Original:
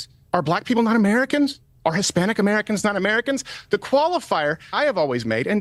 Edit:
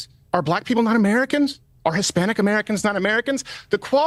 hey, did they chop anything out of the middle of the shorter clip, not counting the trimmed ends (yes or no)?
no